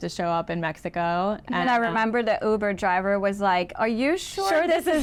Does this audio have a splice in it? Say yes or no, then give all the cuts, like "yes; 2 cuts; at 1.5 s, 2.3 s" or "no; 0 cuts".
no; 0 cuts